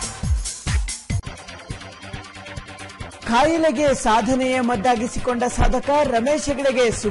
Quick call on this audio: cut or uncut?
cut